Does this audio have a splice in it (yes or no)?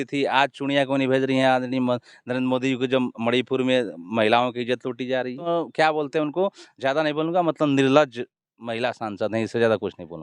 yes